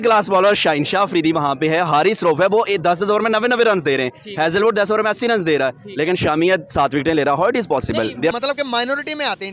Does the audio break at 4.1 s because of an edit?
no; 1 cut; at 8.3 s

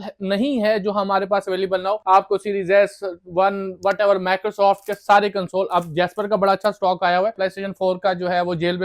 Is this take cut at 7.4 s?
yes; 2 cuts; at 2.0 s, 7.4 s

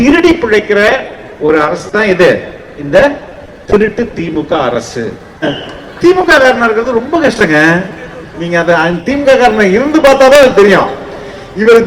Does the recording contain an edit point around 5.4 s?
yes; 1 cut; at 5.4 s

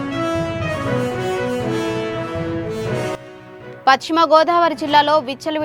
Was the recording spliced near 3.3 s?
yes; 1 cut; at 3.3 s

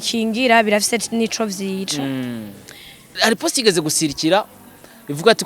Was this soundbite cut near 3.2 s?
yes; 1 cut; at 3.2 s

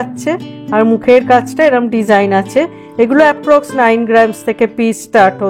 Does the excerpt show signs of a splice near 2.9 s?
no; 0 cuts

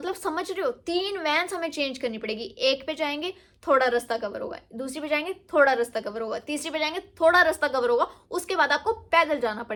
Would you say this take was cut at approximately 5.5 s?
no; 0 cuts

